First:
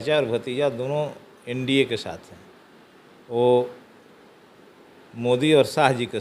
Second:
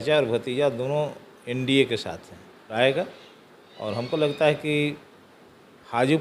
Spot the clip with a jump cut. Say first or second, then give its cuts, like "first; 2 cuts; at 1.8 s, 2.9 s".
second; 1 cut; at 2.7 s